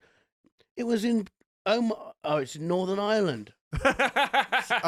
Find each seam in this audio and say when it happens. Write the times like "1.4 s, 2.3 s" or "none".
none